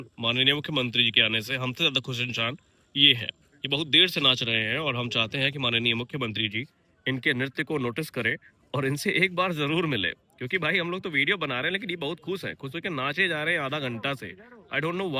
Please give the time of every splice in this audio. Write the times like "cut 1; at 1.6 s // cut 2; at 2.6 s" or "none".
none

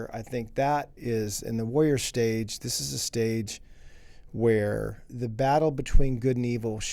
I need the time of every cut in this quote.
cut 1; at 0.9 s // cut 2; at 5.1 s

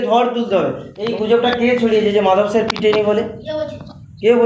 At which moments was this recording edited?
cut 1; at 0.9 s

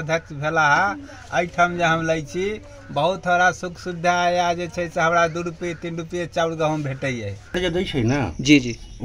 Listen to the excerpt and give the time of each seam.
cut 1; at 7.6 s

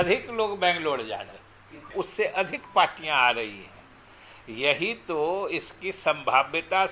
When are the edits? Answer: cut 1; at 1.9 s

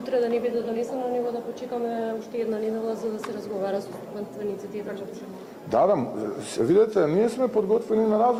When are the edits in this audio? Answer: none

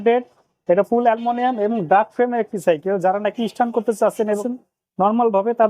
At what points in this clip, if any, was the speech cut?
cut 1; at 4.4 s

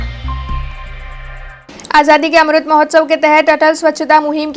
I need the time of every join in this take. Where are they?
cut 1; at 1.6 s

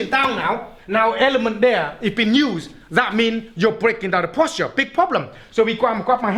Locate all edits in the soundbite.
none

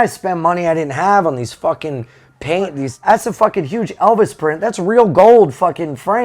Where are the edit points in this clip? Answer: cut 1; at 2.9 s

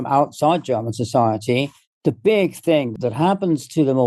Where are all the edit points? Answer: cut 1; at 1.8 s // cut 2; at 3.0 s

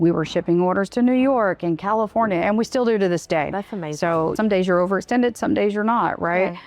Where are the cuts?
cut 1; at 4.4 s

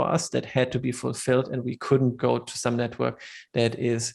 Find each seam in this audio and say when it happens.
none

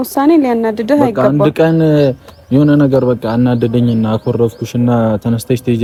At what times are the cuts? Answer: none

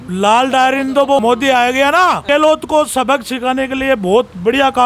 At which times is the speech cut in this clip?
cut 1; at 1.2 s // cut 2; at 2.2 s

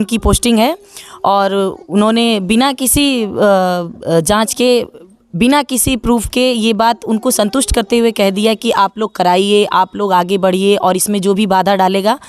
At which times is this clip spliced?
none

